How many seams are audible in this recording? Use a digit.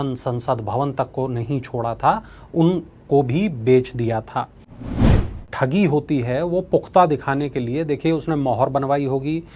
1